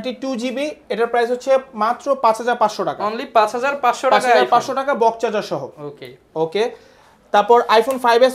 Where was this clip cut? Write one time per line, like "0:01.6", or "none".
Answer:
none